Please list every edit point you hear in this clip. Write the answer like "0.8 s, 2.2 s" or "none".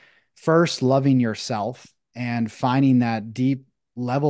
none